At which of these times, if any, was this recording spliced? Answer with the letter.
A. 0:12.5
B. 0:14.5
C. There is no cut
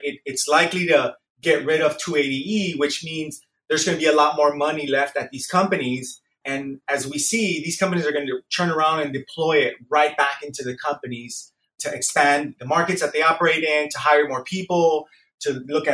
A